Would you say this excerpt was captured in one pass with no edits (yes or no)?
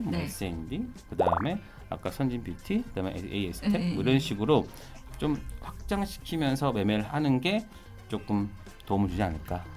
yes